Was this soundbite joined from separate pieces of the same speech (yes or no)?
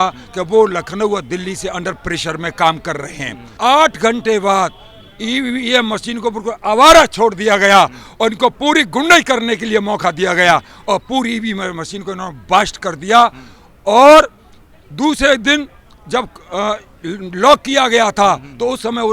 yes